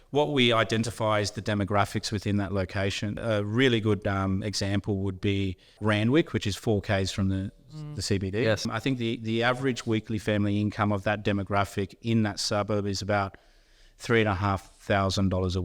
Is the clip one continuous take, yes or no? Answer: no